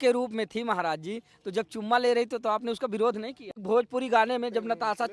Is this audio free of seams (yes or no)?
no